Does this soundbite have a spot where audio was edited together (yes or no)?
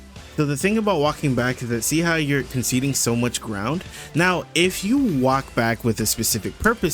no